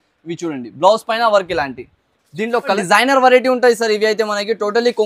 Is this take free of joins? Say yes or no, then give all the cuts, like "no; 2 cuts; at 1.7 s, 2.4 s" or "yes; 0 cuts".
no; 1 cut; at 2.8 s